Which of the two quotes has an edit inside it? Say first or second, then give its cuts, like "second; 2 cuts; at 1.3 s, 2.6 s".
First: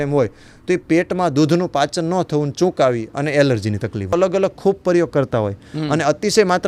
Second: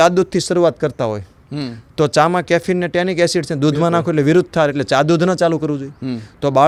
first; 1 cut; at 4.1 s